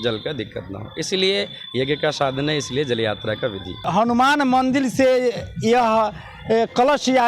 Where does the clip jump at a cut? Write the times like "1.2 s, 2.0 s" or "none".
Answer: 3.9 s